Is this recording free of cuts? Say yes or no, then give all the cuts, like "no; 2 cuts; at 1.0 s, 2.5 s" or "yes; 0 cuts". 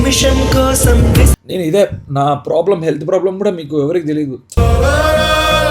no; 1 cut; at 1.4 s